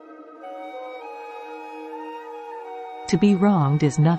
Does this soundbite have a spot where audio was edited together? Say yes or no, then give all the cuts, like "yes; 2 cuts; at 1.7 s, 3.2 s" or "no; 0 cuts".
yes; 1 cut; at 2.8 s